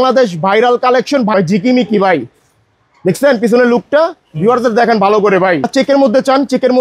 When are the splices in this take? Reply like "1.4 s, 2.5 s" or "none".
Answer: 1.3 s, 5.7 s